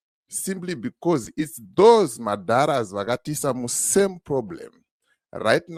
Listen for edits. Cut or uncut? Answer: uncut